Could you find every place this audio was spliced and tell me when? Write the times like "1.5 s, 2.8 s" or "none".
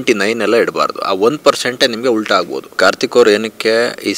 2.8 s